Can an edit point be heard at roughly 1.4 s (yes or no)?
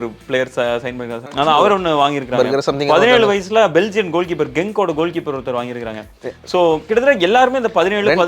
yes